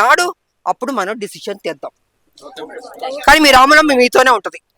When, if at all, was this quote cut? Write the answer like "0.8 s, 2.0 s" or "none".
none